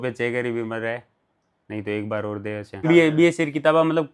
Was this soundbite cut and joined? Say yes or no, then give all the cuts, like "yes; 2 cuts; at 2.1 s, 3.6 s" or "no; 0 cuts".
yes; 1 cut; at 2.8 s